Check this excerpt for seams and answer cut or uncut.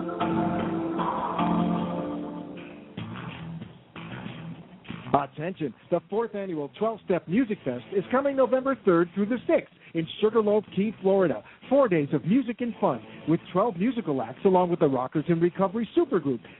cut